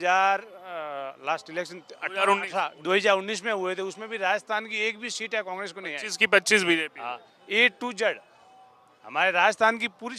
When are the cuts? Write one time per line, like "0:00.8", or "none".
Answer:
none